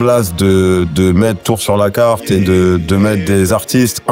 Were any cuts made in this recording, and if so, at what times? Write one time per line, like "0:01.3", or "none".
0:01.4